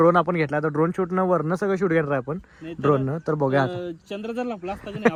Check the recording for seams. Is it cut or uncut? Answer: uncut